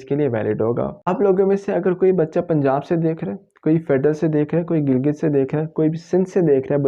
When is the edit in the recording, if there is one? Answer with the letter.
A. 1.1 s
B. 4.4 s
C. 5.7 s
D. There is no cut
A